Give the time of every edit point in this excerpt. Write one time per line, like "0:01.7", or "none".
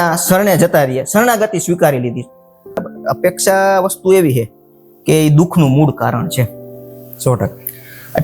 0:02.8

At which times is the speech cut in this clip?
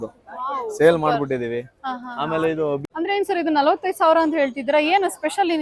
0:02.8

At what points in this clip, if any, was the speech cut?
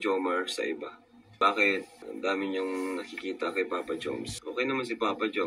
0:01.4

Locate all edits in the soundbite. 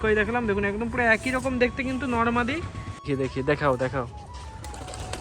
0:03.1

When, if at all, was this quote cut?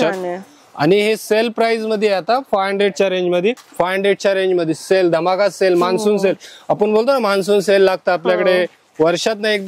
0:03.6

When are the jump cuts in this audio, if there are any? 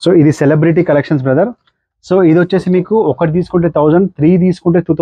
none

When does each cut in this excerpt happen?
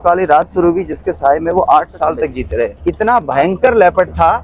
0:02.7

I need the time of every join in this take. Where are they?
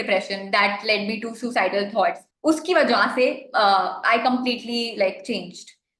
0:02.3

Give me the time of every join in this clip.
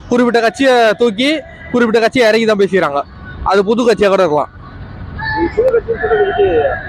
none

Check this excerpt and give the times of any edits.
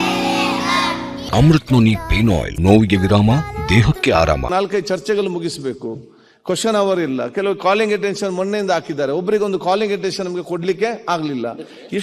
0:01.2
0:02.5
0:04.4

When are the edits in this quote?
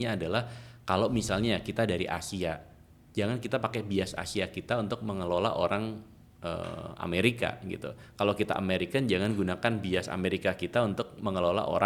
none

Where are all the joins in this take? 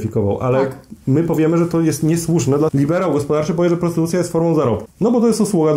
0:02.7
0:04.9

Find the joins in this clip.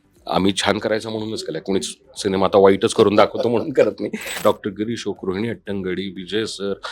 0:04.3

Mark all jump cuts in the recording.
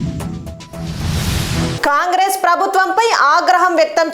0:01.8

